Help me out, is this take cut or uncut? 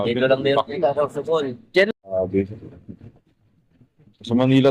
cut